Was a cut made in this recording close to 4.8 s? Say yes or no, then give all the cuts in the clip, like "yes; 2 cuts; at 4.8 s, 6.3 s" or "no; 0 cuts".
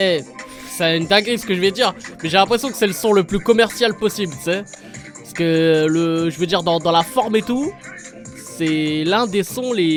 no; 0 cuts